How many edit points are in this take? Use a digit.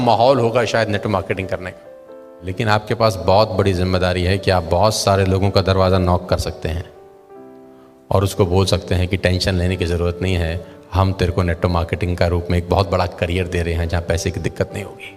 1